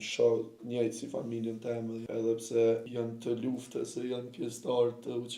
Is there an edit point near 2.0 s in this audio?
yes; 2 cuts; at 2.0 s, 2.9 s

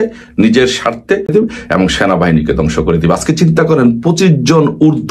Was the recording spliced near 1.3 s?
yes; 1 cut; at 1.3 s

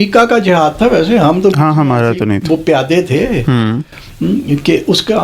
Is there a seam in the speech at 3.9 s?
no; 0 cuts

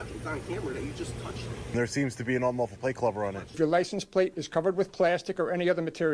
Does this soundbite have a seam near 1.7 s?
yes; 2 cuts; at 1.7 s, 3.5 s

